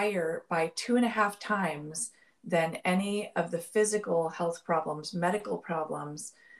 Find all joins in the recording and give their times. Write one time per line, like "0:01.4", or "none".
none